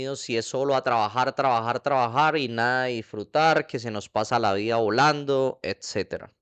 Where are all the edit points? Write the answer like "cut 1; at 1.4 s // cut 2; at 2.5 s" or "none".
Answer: none